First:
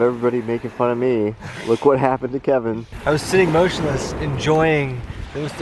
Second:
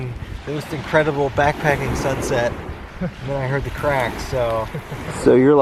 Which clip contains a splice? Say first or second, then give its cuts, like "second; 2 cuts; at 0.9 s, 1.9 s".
first; 1 cut; at 2.9 s